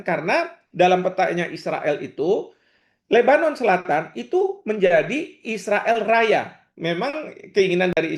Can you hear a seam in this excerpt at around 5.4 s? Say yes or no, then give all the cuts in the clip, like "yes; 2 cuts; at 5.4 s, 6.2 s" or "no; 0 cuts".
no; 1 cut; at 6.6 s